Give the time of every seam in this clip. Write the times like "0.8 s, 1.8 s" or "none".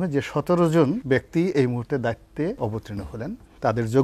1.0 s, 2.9 s